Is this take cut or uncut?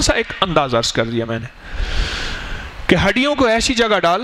uncut